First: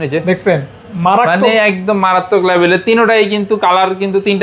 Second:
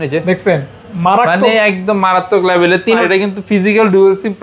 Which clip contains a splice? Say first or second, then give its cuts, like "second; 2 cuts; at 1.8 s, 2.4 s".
second; 1 cut; at 3.0 s